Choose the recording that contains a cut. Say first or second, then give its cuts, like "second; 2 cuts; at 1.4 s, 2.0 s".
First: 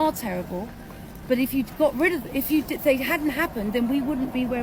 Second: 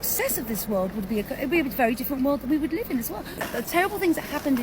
second; 1 cut; at 3.5 s